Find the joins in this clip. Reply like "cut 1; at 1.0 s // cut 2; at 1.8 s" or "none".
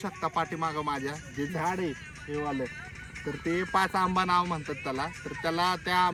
none